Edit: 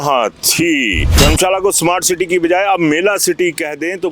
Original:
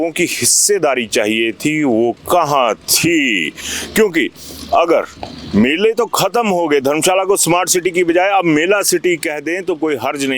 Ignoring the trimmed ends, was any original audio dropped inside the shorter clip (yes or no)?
yes